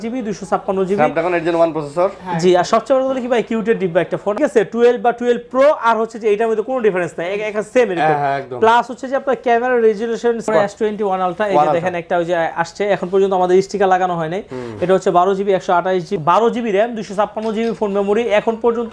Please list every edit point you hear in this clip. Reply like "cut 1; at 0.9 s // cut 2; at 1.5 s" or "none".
cut 1; at 4.4 s // cut 2; at 10.5 s // cut 3; at 16.1 s

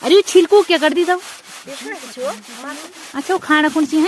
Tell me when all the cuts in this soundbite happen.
none

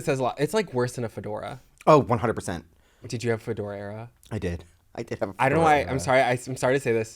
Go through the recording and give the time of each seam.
cut 1; at 3.1 s

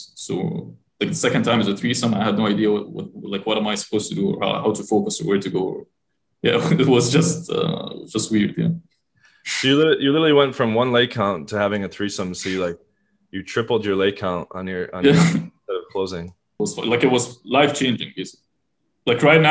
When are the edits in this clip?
cut 1; at 16.4 s

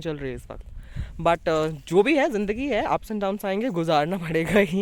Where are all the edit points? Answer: none

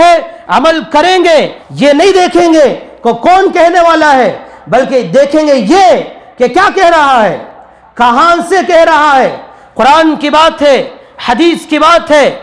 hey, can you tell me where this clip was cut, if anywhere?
cut 1; at 1.6 s

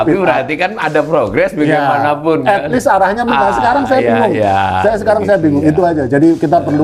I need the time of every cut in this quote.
none

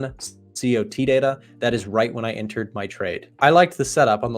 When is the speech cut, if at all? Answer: cut 1; at 3.2 s

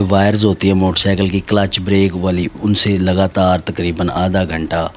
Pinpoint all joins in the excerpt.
none

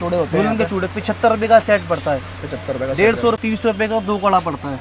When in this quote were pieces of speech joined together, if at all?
cut 1; at 3.4 s

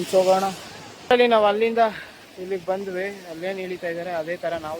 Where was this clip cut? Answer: cut 1; at 1.0 s

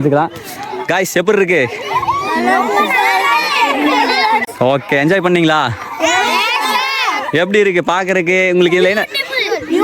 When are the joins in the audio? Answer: cut 1; at 4.5 s

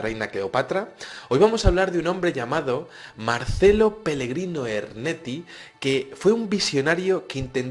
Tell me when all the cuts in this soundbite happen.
cut 1; at 3.7 s

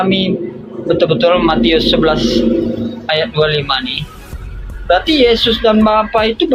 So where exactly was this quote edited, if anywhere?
none

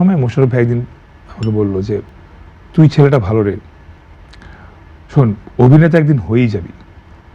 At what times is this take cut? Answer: cut 1; at 2.1 s

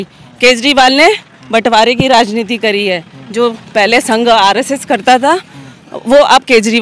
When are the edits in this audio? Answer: none

